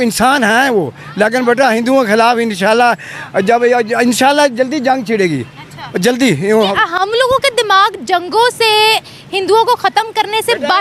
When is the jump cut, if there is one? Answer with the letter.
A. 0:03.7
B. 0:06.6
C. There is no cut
C